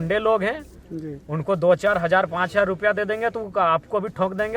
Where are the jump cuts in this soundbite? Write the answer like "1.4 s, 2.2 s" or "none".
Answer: none